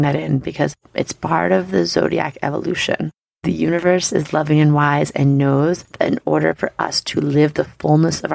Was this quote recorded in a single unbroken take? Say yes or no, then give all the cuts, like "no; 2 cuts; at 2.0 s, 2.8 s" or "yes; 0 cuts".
yes; 0 cuts